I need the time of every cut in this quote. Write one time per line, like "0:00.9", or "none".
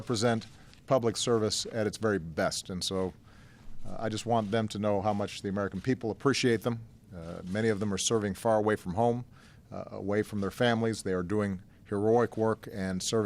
none